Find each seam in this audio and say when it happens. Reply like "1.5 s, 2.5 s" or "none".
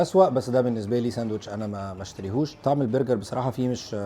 none